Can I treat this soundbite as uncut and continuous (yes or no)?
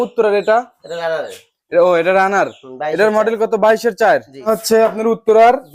no